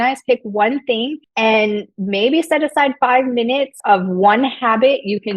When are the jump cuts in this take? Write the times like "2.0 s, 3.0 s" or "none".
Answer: 1.2 s, 1.9 s, 3.7 s